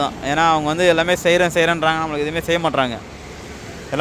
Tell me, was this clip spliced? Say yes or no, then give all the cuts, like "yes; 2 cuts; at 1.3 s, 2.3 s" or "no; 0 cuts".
no; 0 cuts